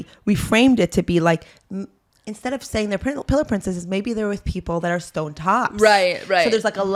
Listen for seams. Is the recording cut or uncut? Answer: uncut